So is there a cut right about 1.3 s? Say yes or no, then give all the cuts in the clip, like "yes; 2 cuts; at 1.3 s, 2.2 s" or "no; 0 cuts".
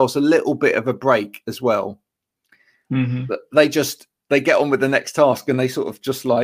no; 0 cuts